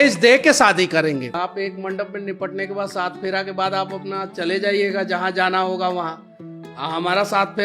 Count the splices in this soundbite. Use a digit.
1